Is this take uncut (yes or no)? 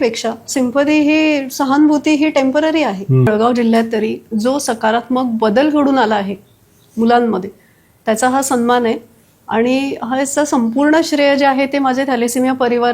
no